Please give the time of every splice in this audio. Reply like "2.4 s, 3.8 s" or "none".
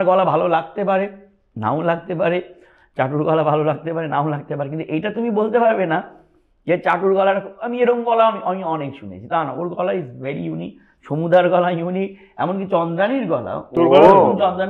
none